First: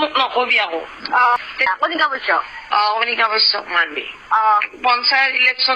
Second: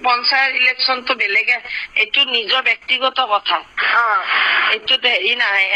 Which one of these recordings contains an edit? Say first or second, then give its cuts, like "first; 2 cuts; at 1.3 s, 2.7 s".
first; 1 cut; at 1.7 s